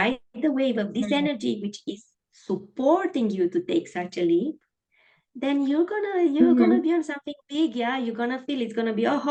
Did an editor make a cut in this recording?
no; 0 cuts

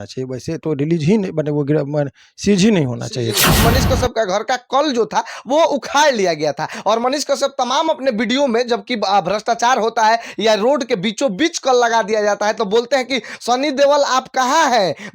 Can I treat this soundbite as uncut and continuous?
no; 1 cut; at 3.6 s

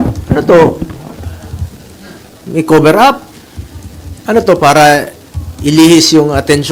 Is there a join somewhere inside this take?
no; 0 cuts

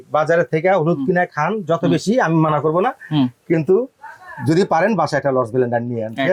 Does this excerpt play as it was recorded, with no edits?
yes; 0 cuts

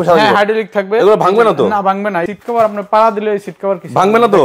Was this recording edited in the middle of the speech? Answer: yes; 1 cut; at 2.2 s

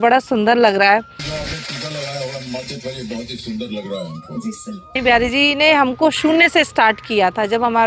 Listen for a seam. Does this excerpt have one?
yes; 2 cuts; at 1.2 s, 5.0 s

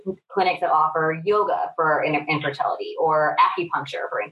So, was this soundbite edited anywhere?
no; 0 cuts

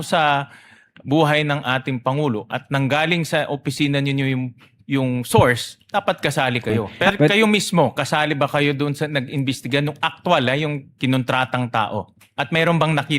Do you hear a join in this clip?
yes; 1 cut; at 6.9 s

